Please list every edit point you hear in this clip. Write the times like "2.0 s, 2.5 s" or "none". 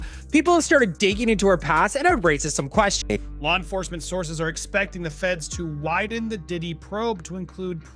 3.0 s

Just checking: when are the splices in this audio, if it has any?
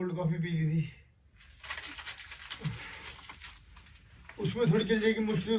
none

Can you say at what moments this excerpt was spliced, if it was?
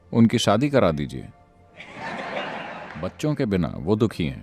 2.9 s

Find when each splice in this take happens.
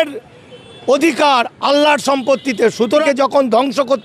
3.0 s

